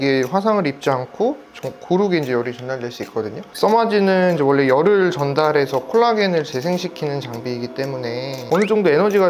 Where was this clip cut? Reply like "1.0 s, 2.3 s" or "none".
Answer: 3.4 s, 8.4 s